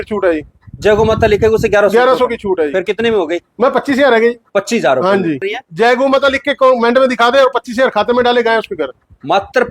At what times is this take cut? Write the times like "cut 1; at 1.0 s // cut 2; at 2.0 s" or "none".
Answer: cut 1; at 5.6 s